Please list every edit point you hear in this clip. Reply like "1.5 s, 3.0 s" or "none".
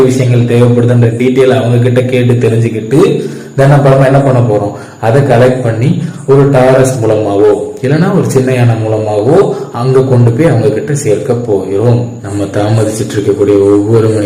12.2 s